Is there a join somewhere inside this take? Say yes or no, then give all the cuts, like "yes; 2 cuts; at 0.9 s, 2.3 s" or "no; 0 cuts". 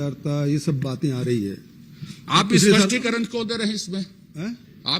no; 0 cuts